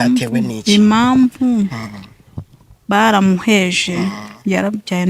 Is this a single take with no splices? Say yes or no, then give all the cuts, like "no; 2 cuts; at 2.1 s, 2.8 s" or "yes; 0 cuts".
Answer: yes; 0 cuts